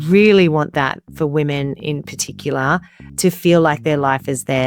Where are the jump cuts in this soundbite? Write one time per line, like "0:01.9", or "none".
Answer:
0:03.0

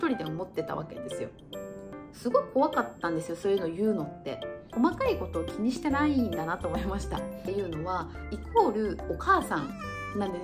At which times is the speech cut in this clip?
0:01.9
0:04.7
0:07.5

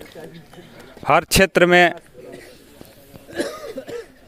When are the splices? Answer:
none

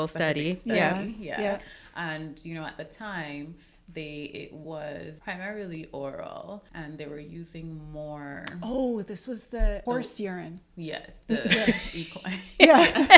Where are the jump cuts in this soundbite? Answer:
0:05.1
0:06.7
0:09.8

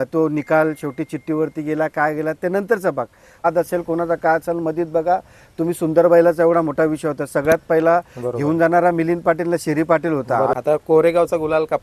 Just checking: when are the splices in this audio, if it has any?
0:03.4
0:10.5

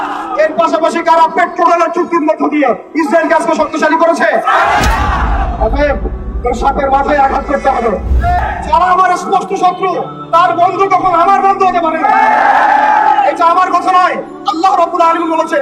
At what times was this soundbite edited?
0:08.4

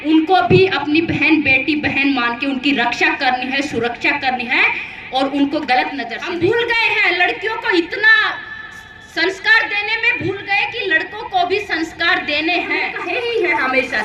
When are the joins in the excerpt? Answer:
0:06.1
0:13.0

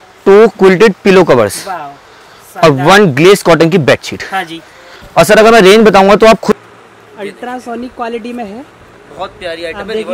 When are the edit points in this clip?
0:06.5

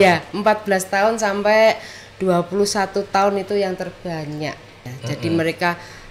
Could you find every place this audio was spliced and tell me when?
0:04.9

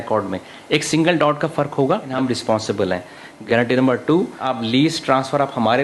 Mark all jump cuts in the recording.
0:02.1
0:03.3
0:04.5

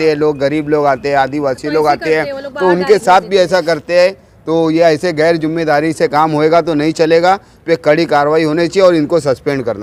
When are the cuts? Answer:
none

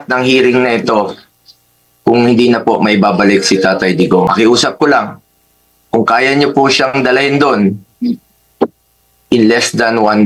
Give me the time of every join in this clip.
0:04.3

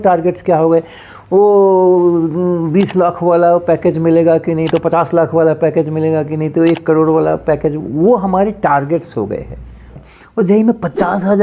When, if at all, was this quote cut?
0:09.9

